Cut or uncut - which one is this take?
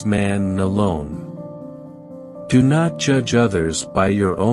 uncut